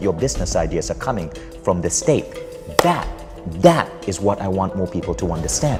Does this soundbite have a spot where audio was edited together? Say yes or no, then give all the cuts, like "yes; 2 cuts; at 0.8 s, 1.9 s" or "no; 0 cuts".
no; 0 cuts